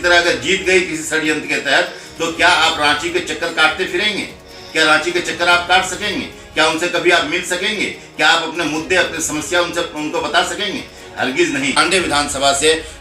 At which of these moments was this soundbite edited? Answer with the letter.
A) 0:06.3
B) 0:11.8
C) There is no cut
B